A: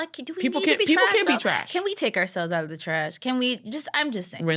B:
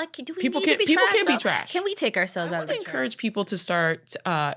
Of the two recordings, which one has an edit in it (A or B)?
B